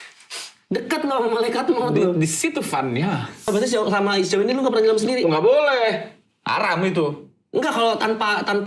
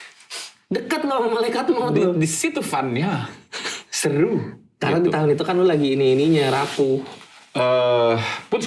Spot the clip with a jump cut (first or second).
first